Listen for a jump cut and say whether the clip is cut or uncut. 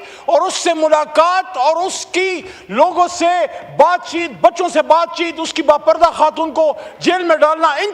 uncut